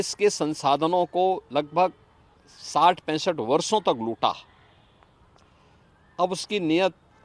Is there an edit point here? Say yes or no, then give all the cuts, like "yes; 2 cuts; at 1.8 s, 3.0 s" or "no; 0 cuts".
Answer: no; 0 cuts